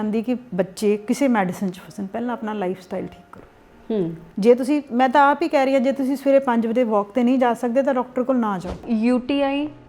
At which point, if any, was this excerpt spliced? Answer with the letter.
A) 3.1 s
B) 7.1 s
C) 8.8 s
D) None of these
C